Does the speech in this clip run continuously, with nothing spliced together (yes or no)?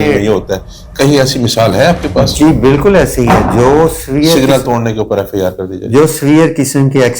yes